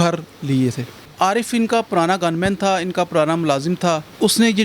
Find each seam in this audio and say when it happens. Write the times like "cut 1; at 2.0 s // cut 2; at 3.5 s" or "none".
cut 1; at 1.0 s